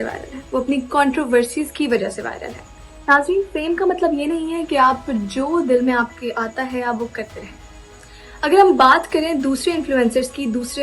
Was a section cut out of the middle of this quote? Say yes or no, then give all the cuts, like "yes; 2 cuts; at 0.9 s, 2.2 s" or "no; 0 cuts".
no; 0 cuts